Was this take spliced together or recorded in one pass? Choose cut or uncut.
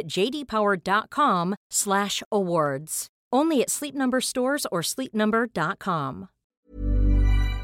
cut